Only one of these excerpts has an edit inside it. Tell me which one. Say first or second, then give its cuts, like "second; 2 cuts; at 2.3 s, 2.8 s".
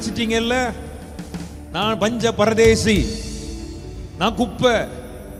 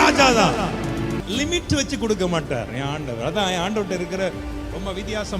second; 1 cut; at 1.2 s